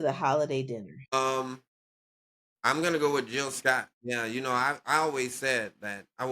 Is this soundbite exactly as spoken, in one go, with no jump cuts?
yes; 0 cuts

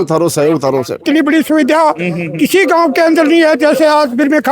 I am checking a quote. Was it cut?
yes; 1 cut; at 1.0 s

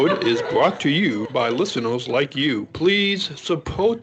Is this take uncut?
yes; 0 cuts

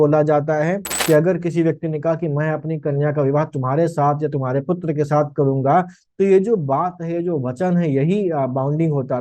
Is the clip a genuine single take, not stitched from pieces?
no; 1 cut; at 0.9 s

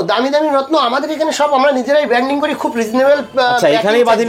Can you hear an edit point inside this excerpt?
no; 0 cuts

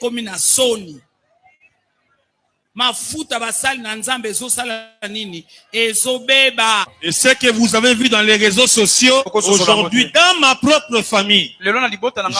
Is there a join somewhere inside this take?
yes; 2 cuts; at 6.9 s, 9.3 s

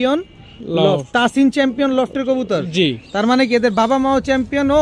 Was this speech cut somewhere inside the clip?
no; 0 cuts

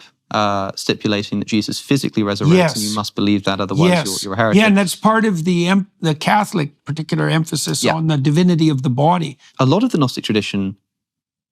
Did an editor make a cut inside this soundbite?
yes; 1 cut; at 9.5 s

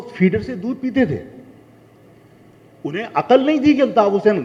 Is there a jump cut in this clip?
no; 0 cuts

